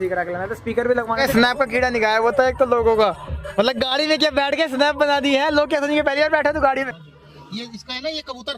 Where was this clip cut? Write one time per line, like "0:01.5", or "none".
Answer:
0:01.1
0:06.9